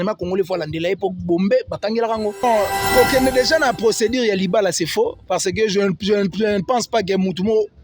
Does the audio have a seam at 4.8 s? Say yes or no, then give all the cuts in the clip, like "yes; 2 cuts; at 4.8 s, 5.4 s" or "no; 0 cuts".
no; 1 cut; at 2.4 s